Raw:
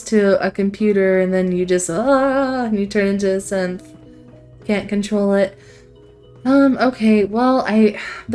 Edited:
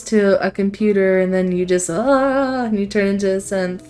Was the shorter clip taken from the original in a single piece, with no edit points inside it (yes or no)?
yes